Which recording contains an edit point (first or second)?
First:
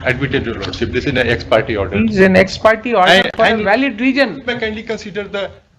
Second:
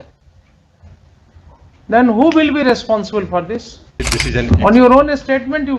second